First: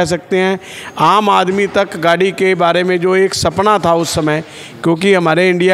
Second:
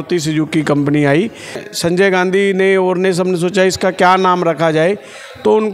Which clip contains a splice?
second; 1 cut; at 1.6 s

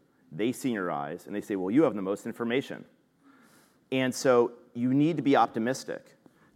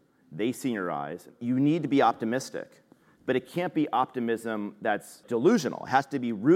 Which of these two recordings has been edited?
second; 2 cuts; at 1.3 s, 5.2 s

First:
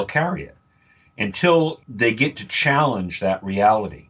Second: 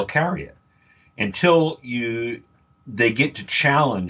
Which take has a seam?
first; 1 cut; at 1.8 s

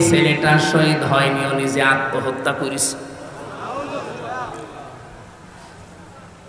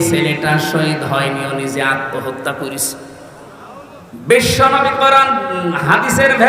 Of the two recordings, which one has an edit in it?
second; 1 cut; at 3.7 s

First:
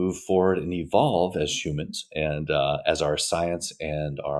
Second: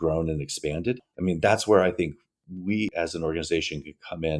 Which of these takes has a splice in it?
second; 1 cut; at 2.9 s

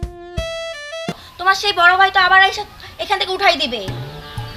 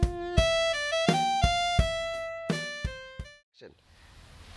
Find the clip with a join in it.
first; 1 cut; at 1.2 s

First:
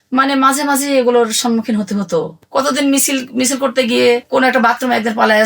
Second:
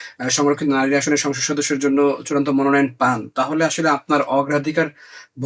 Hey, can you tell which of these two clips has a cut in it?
first; 1 cut; at 2.4 s

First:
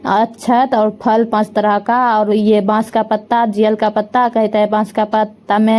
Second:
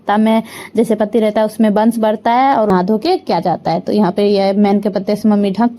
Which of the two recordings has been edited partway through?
second; 1 cut; at 2.7 s

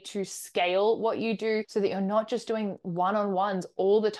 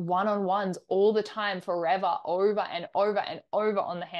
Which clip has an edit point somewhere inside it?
first; 1 cut; at 1.7 s

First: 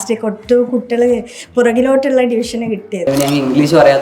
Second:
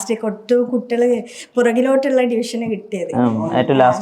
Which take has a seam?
first; 1 cut; at 3.0 s

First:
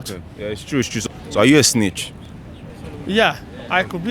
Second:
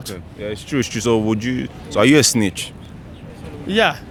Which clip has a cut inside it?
first; 1 cut; at 1.0 s

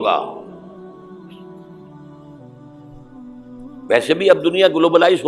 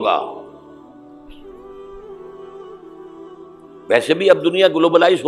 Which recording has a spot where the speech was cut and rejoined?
first; 2 cuts; at 0.8 s, 3.9 s

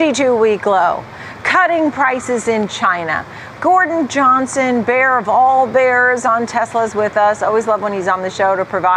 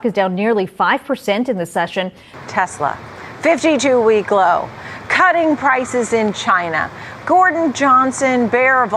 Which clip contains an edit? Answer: second; 1 cut; at 2.3 s

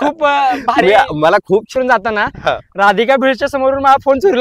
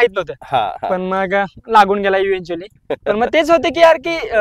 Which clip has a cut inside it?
first; 1 cut; at 1.7 s

